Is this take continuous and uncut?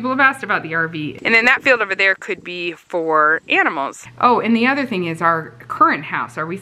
no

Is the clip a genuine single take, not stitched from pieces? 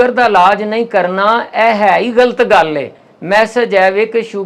yes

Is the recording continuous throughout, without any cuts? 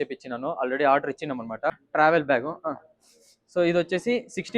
no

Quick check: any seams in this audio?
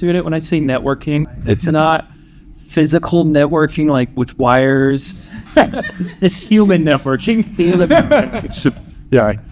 no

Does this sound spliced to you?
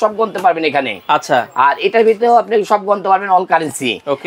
no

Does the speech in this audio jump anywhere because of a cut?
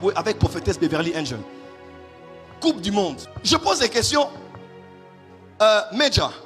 yes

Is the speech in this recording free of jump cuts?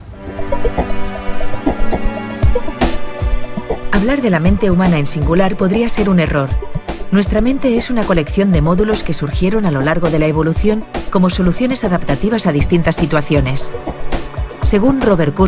no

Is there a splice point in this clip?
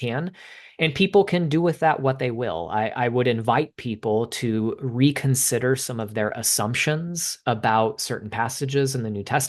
no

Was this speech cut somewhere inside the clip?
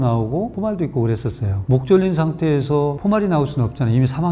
yes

